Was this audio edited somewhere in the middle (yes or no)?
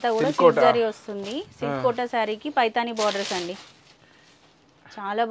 no